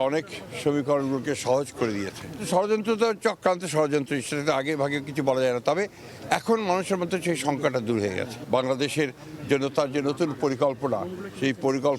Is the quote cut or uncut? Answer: uncut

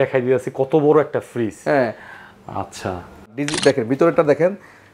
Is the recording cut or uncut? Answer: cut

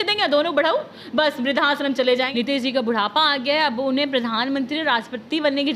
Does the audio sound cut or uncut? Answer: cut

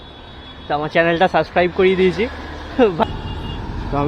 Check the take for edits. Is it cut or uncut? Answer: cut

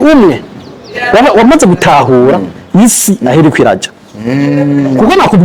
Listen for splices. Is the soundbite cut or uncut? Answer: uncut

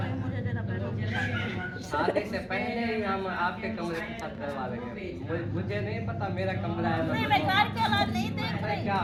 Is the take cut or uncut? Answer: uncut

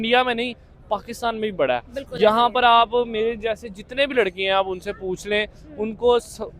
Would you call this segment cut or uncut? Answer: uncut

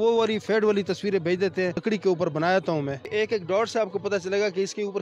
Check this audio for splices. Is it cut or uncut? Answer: cut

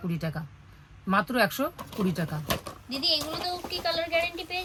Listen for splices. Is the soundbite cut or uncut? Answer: uncut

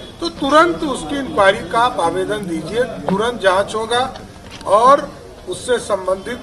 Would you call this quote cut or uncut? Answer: uncut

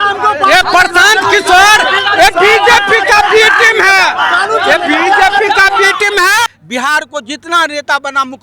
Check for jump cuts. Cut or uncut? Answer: cut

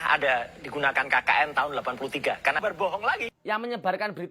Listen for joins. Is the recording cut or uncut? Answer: cut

